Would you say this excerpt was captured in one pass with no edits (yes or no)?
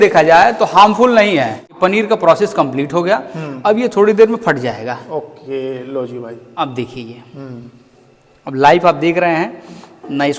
no